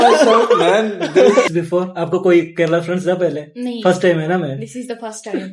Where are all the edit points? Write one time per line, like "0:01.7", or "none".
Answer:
0:01.5